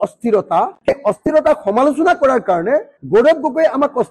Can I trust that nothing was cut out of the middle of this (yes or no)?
yes